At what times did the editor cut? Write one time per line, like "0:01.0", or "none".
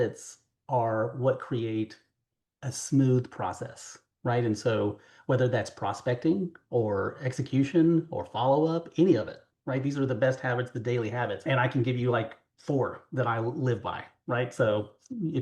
0:11.5